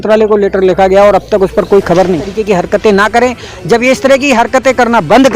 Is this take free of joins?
no; 1 cut; at 2.3 s

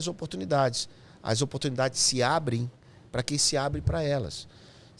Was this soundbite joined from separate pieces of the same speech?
no; 0 cuts

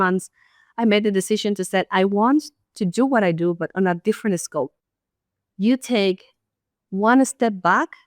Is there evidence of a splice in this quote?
yes; 1 cut; at 4.5 s

